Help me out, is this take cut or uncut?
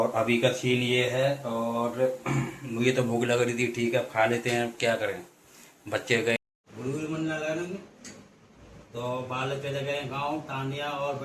cut